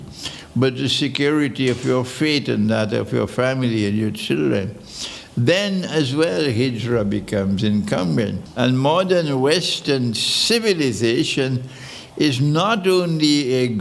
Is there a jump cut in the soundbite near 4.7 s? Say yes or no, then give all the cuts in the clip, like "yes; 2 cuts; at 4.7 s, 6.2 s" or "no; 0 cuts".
no; 1 cut; at 8.4 s